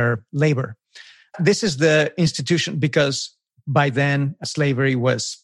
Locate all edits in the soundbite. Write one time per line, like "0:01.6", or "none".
0:01.3
0:04.4